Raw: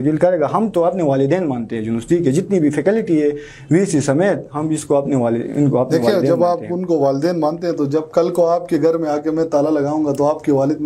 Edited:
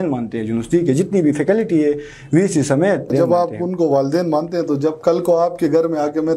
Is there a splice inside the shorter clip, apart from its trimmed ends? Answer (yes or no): yes